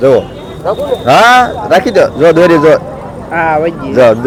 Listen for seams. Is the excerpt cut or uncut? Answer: uncut